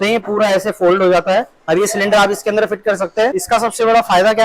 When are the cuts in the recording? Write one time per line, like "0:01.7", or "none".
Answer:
0:01.6
0:03.4